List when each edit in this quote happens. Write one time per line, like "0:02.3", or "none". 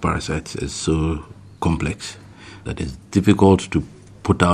0:02.6